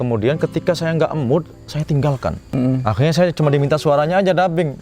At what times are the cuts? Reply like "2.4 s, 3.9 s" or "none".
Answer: 2.5 s